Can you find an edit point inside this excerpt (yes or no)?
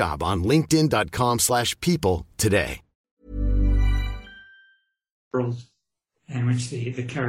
no